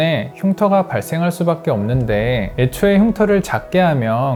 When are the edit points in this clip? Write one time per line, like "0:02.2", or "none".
none